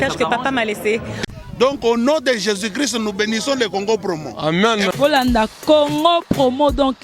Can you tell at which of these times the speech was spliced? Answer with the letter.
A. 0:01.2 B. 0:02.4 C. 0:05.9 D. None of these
A